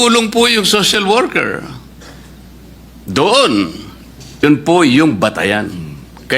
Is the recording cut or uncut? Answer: cut